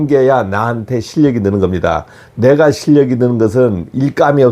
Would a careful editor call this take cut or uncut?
uncut